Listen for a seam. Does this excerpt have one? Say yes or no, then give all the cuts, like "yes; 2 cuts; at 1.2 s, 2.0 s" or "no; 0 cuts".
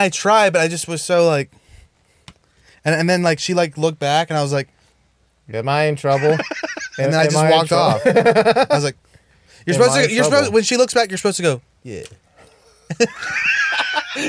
no; 0 cuts